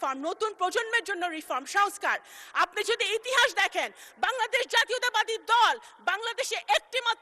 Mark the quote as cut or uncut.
uncut